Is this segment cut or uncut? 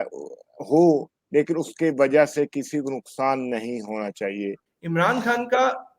cut